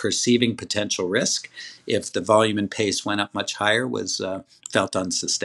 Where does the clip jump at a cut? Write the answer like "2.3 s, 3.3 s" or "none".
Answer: 4.5 s